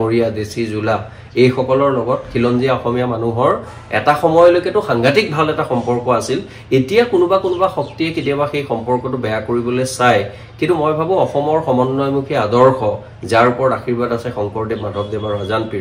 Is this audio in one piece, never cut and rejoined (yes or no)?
yes